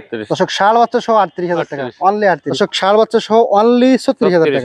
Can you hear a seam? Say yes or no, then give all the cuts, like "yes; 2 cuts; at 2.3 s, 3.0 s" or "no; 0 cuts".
yes; 1 cut; at 2.5 s